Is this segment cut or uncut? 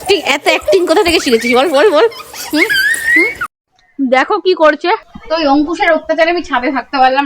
cut